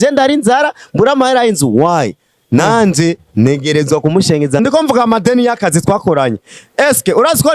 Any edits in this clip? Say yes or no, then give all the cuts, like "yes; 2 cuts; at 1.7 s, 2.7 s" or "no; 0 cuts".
yes; 1 cut; at 4.6 s